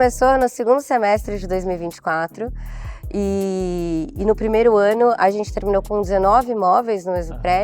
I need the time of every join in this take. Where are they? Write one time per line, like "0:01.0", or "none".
none

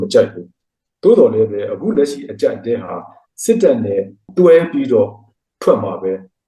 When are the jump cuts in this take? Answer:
0:04.2

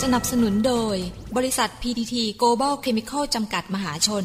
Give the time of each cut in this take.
none

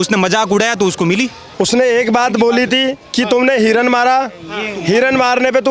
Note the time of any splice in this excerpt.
0:01.4

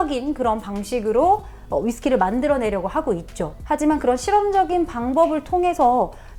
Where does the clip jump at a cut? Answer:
none

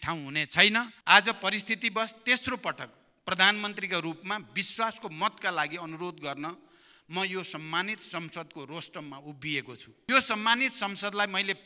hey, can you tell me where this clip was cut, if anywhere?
0:00.9
0:10.1

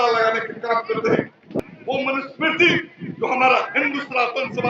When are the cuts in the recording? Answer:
0:01.6

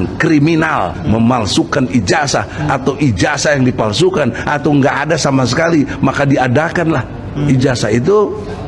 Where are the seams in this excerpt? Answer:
none

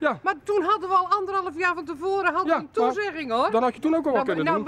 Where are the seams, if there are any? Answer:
none

